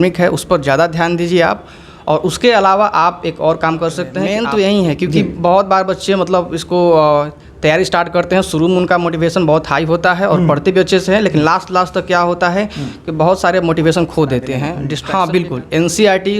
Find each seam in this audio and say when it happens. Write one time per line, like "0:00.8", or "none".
0:04.4
0:14.9